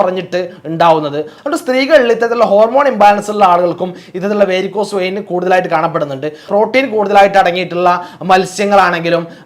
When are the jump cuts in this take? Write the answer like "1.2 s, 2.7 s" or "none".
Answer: 1.3 s, 6.5 s